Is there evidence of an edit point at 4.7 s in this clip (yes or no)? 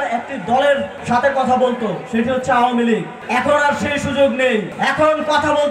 yes